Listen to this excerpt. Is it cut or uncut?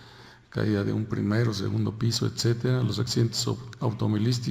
cut